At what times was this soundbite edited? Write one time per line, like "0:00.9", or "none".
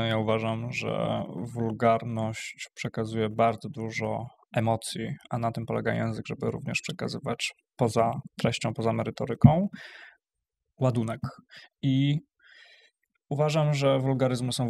none